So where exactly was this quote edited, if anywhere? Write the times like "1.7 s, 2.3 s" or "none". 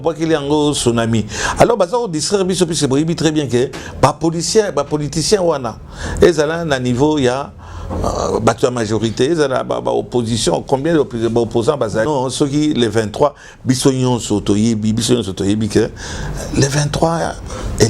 12.1 s